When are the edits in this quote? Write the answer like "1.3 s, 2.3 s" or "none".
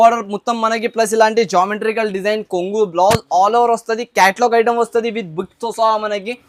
none